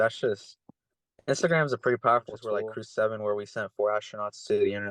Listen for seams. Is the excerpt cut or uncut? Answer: cut